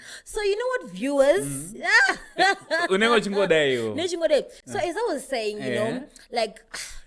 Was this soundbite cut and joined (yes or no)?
no